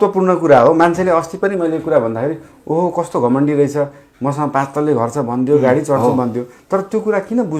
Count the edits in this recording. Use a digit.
0